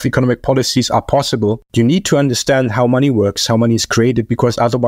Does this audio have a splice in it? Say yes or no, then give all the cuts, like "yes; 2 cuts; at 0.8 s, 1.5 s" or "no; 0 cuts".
yes; 1 cut; at 1.6 s